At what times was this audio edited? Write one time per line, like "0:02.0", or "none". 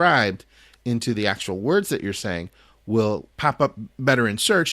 0:03.3